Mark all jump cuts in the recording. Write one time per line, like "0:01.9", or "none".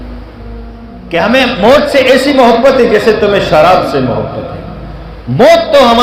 0:01.0